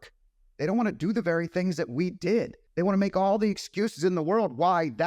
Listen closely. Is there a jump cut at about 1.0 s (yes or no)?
no